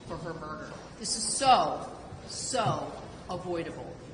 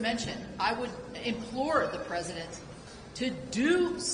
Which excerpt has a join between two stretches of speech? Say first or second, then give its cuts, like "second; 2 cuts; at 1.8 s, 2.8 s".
second; 1 cut; at 1.5 s